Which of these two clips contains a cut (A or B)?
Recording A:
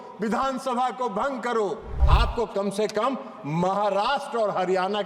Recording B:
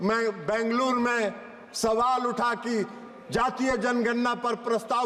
A